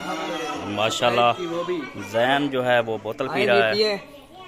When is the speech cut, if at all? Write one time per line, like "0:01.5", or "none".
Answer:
none